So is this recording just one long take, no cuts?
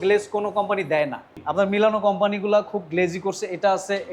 no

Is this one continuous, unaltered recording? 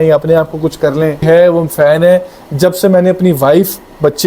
no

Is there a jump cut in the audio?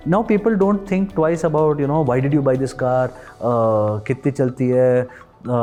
no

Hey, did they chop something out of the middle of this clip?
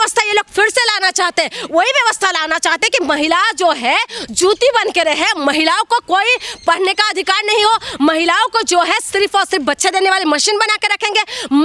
no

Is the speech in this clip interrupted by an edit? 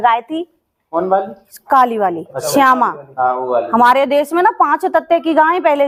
no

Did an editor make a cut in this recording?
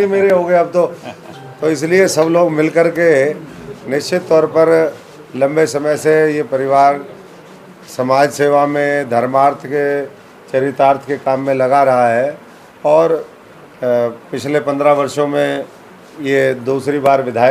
no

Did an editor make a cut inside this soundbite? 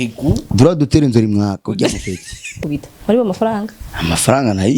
yes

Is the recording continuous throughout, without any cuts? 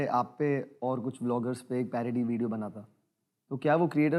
yes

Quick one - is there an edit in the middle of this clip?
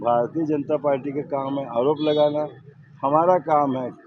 no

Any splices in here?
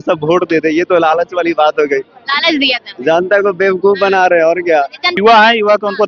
yes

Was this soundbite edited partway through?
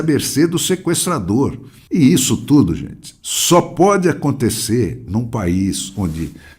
yes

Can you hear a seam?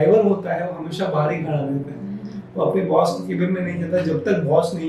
no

